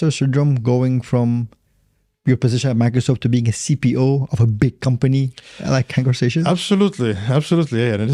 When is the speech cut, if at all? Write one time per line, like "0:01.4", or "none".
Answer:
none

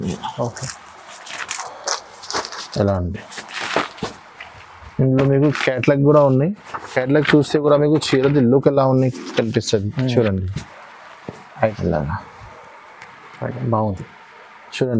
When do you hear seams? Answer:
0:11.7

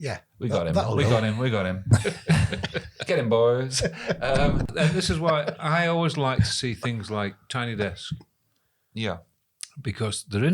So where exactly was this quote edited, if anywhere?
0:04.7

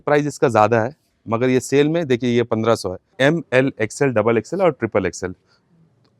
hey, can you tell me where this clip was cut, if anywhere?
0:03.1

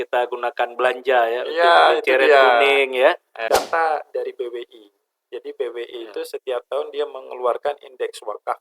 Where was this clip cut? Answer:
0:03.4

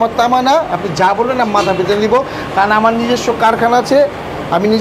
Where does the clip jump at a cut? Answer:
none

